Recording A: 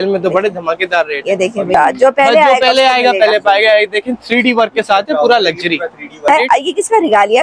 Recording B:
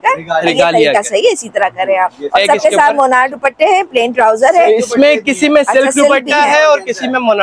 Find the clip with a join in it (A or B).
A